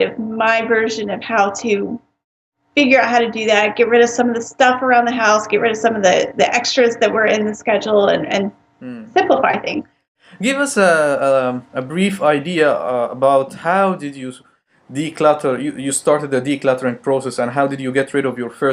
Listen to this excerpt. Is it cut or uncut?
uncut